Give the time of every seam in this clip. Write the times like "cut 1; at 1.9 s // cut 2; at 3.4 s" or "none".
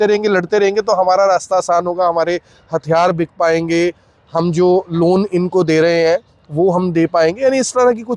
none

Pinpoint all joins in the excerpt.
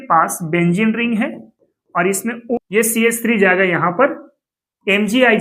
cut 1; at 2.6 s

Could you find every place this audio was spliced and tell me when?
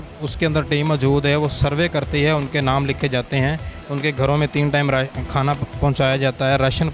none

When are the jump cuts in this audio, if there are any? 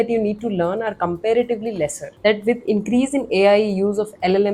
cut 1; at 2.0 s

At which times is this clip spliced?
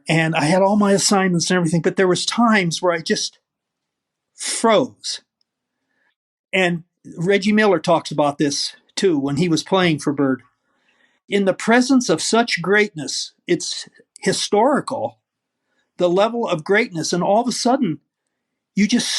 cut 1; at 9.4 s // cut 2; at 11.2 s

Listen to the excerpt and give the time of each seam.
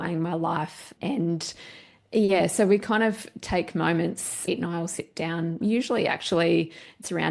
cut 1; at 4.3 s

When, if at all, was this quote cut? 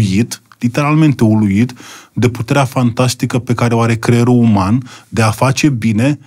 none

